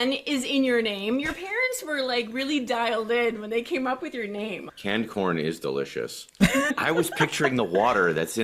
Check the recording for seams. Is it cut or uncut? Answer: cut